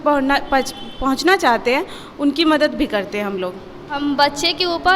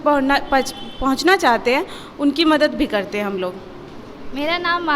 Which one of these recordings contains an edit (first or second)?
first